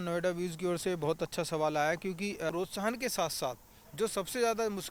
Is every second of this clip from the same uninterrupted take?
no; 1 cut; at 2.5 s

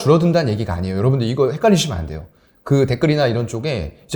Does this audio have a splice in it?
no; 0 cuts

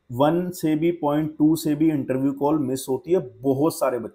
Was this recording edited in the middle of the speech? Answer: no; 0 cuts

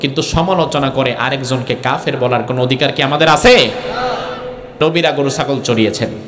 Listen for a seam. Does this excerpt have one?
yes; 1 cut; at 4.8 s

